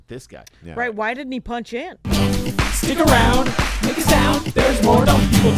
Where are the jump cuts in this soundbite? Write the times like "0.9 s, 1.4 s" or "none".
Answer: 2.0 s